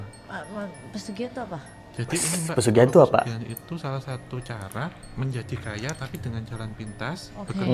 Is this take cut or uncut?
uncut